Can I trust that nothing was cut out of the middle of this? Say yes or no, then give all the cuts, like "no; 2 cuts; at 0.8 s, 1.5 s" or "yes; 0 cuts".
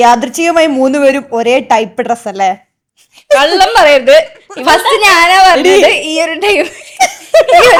yes; 0 cuts